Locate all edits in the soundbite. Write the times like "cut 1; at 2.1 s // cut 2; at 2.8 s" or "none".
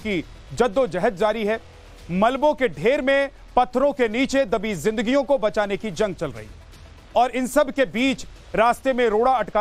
cut 1; at 5.9 s